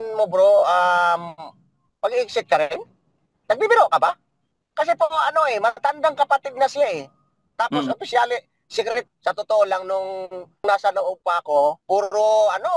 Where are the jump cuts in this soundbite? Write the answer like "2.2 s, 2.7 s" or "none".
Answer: 9.1 s, 10.6 s, 11.8 s